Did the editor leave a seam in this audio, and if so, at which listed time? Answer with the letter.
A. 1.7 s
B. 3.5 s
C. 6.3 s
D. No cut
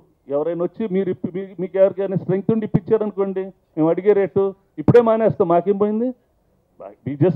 D